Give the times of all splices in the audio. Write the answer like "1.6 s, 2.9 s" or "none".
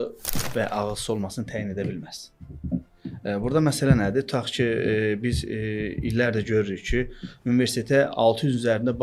none